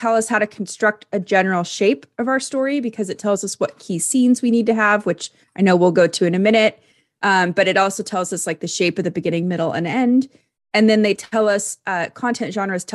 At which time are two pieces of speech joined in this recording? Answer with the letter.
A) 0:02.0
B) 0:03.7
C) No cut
C